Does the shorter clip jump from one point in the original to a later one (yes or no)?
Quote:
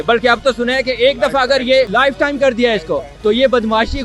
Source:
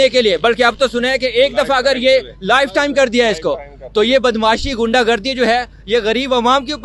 yes